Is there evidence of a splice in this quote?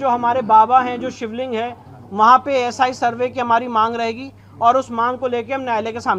no; 0 cuts

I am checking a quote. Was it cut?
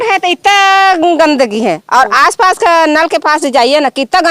no; 0 cuts

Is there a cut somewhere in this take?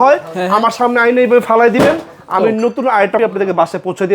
yes; 1 cut; at 3.2 s

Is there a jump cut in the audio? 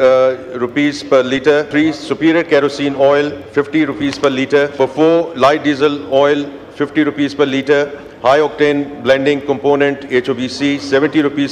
yes; 2 cuts; at 1.7 s, 4.8 s

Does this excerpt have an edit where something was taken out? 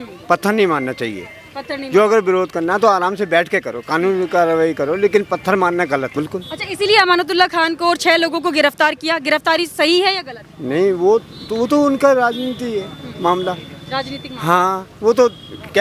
no; 0 cuts

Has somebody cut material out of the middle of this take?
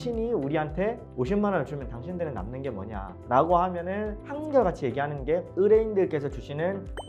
no; 0 cuts

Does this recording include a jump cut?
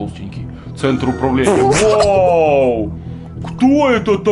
no; 0 cuts

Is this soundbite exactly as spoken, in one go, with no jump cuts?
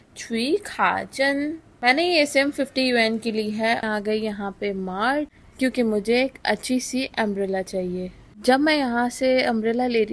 no; 1 cut; at 3.8 s

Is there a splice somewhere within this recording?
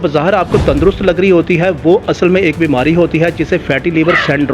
no; 0 cuts

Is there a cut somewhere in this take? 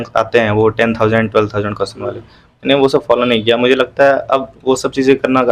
no; 0 cuts

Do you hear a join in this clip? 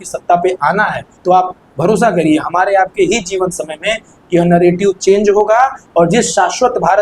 yes; 1 cut; at 1.1 s

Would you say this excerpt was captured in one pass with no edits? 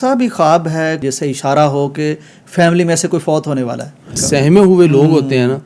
no; 2 cuts; at 1.0 s, 4.2 s

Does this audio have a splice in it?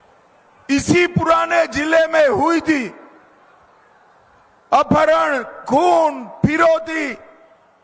no; 0 cuts

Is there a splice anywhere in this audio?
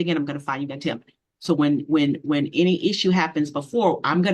no; 0 cuts

